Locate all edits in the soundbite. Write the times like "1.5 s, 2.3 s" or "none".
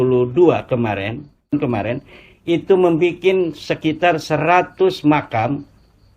1.5 s